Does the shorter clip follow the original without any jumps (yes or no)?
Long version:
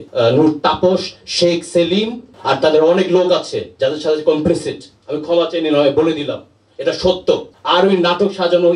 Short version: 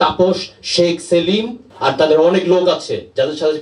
yes